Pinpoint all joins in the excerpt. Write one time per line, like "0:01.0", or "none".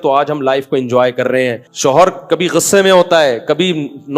0:01.7